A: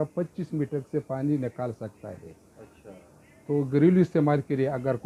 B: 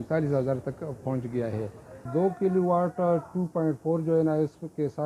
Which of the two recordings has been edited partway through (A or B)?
B